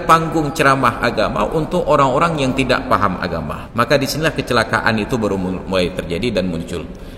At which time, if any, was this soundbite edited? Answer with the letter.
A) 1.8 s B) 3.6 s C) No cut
B